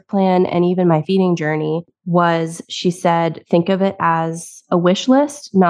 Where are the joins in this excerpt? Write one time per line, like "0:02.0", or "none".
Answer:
0:01.8